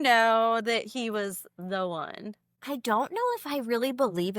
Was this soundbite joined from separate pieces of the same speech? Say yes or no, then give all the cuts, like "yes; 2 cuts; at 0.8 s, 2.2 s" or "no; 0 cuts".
yes; 1 cut; at 2.5 s